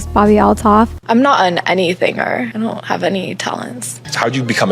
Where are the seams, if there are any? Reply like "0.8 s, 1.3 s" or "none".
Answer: 1.0 s, 2.5 s, 3.9 s